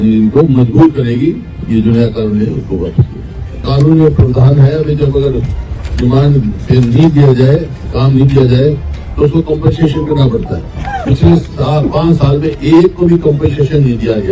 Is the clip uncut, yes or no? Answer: no